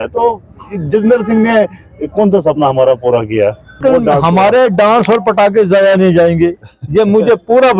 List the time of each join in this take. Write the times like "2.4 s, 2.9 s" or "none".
3.8 s